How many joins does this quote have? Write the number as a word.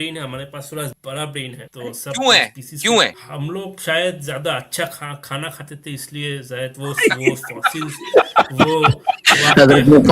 three